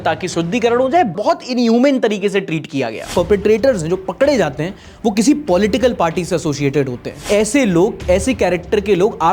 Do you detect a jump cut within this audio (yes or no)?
yes